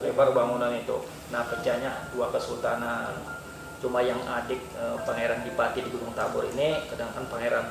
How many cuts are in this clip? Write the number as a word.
one